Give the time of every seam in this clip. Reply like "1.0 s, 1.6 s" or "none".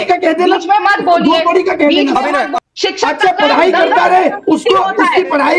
2.5 s